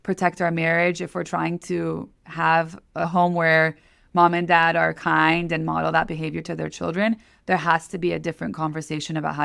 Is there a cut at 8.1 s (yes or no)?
no